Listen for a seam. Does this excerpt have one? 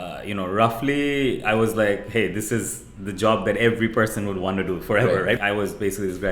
yes; 1 cut; at 5.4 s

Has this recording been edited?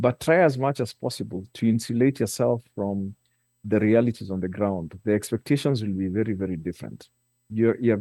no; 0 cuts

